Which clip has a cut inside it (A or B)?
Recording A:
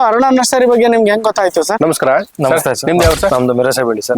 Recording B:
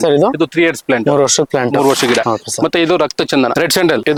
A